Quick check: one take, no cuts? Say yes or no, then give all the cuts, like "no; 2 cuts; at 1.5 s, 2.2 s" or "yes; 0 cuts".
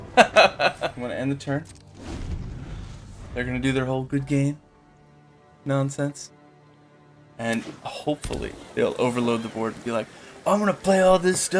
no; 1 cut; at 0.9 s